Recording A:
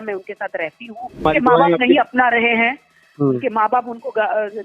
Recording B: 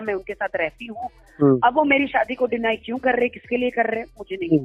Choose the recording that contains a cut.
A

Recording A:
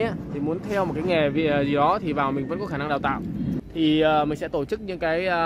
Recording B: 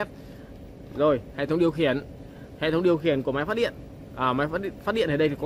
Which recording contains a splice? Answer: A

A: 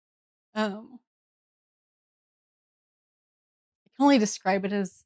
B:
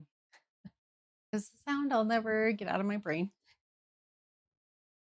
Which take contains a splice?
B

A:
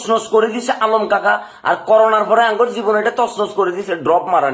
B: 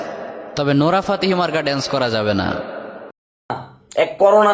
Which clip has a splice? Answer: B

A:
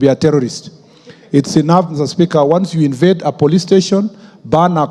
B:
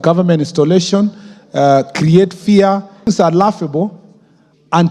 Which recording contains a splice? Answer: B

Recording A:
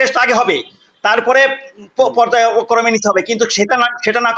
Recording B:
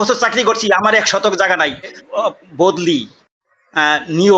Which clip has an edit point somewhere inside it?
B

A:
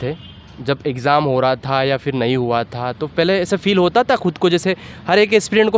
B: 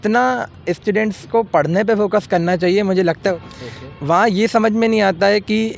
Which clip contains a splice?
B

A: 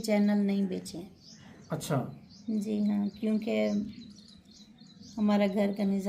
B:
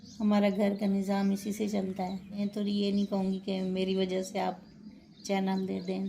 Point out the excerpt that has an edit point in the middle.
B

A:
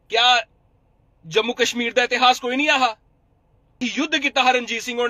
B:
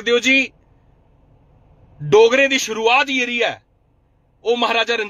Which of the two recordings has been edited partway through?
A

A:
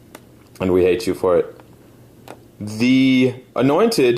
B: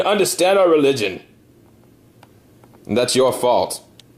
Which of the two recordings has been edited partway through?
B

